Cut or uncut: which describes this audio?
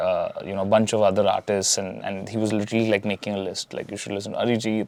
uncut